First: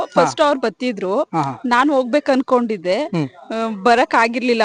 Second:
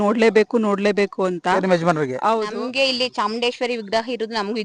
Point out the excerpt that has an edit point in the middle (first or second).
second